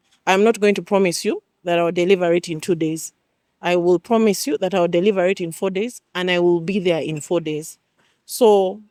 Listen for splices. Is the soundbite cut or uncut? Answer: uncut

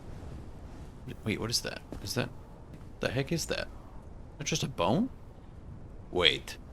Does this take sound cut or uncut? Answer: cut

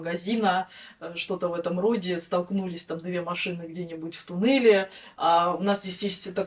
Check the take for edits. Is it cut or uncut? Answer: uncut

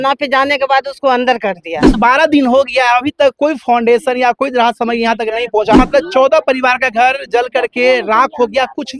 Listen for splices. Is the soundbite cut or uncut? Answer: cut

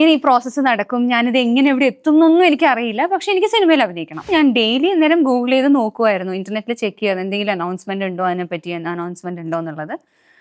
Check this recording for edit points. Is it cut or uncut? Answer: cut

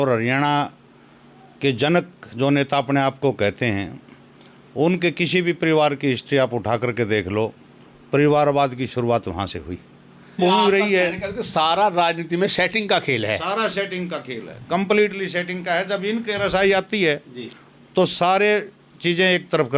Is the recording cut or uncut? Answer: cut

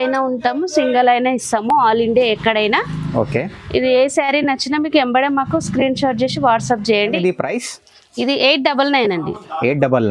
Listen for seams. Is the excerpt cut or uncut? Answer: uncut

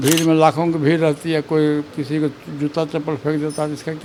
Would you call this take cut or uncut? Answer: uncut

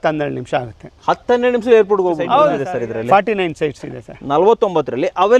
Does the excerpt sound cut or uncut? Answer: cut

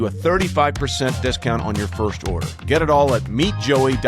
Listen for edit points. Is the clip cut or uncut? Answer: uncut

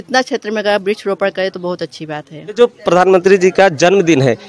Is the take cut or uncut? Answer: cut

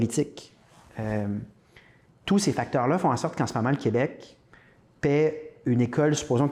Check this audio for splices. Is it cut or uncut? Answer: uncut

